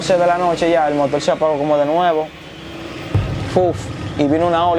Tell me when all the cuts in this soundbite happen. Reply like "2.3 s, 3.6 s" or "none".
none

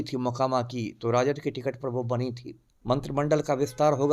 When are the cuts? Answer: 2.7 s

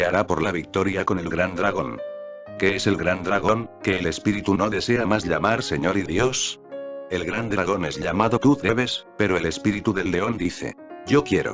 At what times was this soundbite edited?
8.6 s

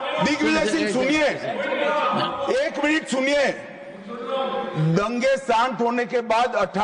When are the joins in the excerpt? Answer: none

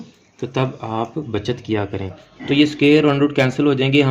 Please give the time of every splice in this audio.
2.3 s

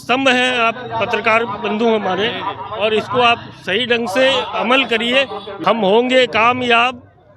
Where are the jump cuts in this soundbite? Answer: 5.5 s

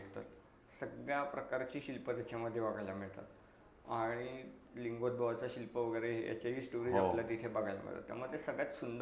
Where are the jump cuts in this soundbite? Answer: 4.6 s

